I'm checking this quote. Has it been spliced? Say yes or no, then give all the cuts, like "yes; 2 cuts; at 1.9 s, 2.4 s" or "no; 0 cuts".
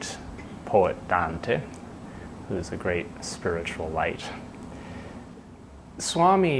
yes; 1 cut; at 5.4 s